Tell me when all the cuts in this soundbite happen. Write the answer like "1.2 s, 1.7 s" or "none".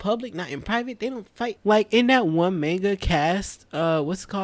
1.6 s

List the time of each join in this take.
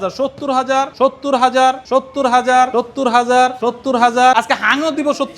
0.9 s, 1.8 s, 2.7 s, 3.6 s, 4.3 s

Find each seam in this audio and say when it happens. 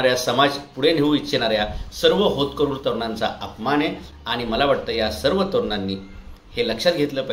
none

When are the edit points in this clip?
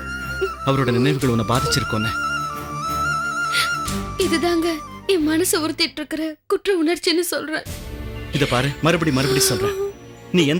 none

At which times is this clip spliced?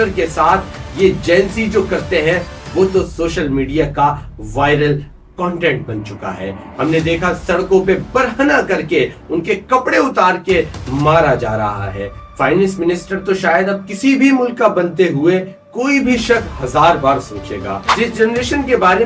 17.8 s

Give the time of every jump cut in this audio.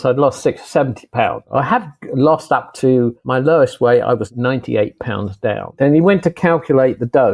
1.5 s, 3.2 s, 4.3 s, 5.8 s

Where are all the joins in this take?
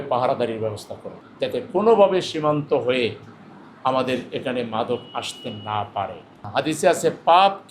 1.1 s, 6.3 s

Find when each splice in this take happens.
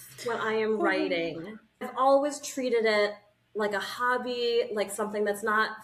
1.9 s

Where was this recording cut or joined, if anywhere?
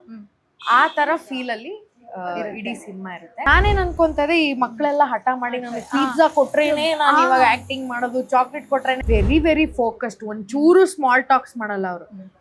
3.3 s, 9.0 s

